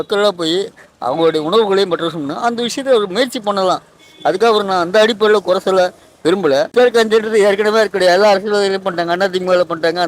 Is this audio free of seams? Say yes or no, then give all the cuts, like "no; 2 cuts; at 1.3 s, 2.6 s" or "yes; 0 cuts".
no; 1 cut; at 6.7 s